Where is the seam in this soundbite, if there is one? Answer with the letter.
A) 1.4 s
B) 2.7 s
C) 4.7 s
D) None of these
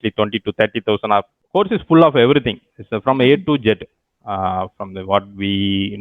A